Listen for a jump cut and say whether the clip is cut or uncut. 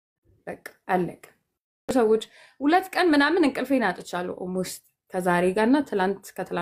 cut